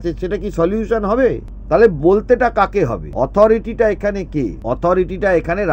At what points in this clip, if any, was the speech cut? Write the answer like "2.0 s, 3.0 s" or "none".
1.5 s, 3.0 s, 4.6 s